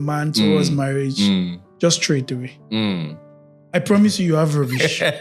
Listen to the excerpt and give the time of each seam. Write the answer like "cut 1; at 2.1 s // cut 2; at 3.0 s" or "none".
none